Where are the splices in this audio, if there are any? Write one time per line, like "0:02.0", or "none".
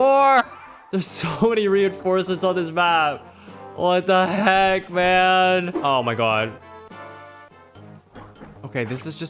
0:05.8